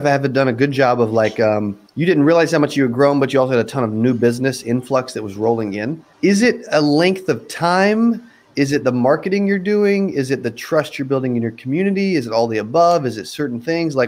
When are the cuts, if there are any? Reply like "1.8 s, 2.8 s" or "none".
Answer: 1.8 s, 6.0 s